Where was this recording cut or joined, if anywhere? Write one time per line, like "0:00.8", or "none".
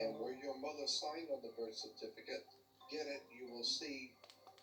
none